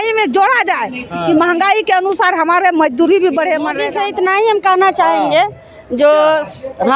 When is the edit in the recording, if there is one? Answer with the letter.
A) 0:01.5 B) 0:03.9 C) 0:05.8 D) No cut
B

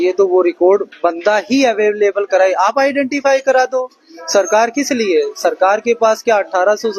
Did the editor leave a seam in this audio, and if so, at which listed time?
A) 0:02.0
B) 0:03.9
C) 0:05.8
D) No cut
D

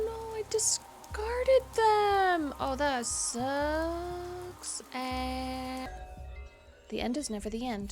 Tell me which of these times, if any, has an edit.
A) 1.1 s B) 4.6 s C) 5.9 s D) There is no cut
C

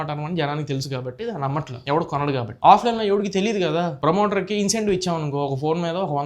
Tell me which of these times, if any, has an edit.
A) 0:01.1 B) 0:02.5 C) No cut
C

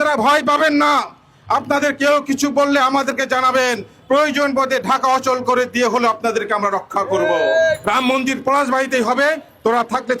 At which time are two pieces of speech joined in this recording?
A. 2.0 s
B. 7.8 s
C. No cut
B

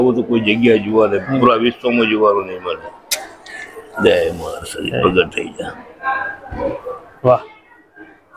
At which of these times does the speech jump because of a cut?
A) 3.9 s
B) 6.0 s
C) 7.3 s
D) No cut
A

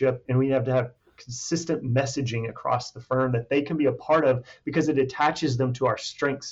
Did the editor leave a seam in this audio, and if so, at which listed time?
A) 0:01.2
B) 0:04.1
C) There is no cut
C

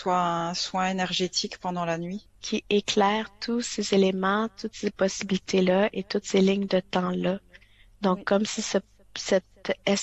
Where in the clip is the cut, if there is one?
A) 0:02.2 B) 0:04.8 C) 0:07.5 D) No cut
A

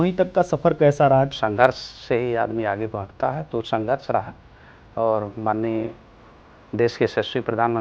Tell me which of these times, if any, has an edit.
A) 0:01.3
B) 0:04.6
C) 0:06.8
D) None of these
A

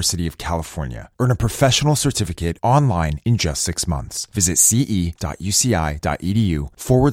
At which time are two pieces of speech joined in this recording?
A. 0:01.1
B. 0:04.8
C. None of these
C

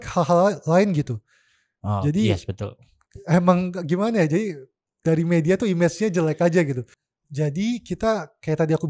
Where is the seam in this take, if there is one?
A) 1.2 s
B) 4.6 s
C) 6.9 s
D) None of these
C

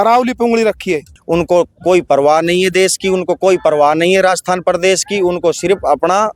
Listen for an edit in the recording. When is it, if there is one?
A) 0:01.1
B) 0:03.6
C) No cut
A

